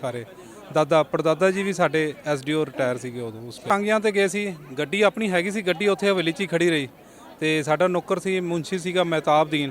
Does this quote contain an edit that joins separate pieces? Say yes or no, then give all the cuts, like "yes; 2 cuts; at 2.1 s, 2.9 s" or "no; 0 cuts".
yes; 1 cut; at 3.7 s